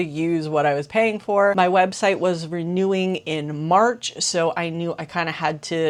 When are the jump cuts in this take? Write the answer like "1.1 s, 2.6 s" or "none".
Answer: none